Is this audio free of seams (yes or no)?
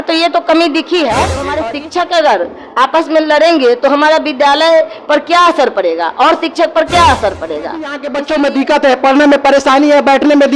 no